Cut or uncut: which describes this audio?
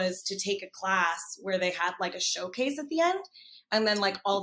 uncut